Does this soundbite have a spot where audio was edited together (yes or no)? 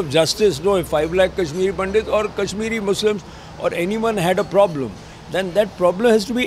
no